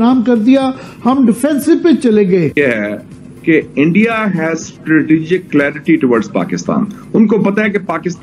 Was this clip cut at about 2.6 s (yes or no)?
yes